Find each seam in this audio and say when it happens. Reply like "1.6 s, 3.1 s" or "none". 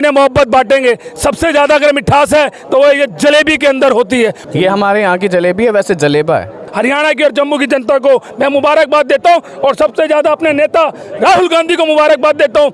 4.4 s, 6.7 s

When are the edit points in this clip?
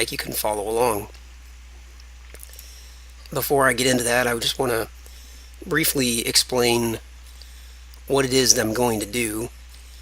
1.8 s

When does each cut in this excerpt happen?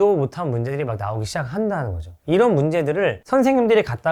none

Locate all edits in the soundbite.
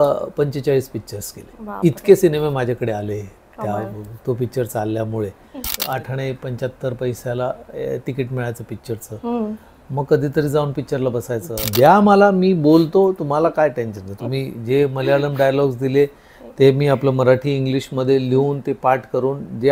5.7 s, 11.5 s

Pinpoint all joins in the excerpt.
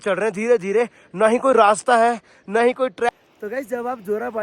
3.1 s

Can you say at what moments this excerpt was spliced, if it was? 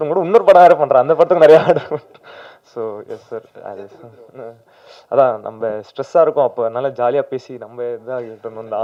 none

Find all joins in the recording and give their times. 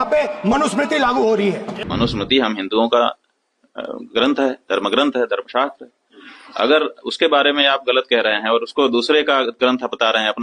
1.7 s

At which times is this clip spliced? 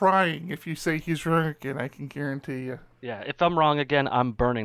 2.9 s

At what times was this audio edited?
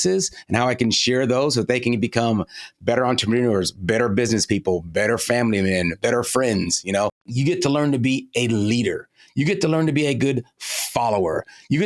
6.0 s, 7.3 s

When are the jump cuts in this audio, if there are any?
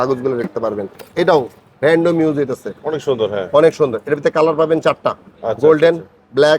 1.0 s

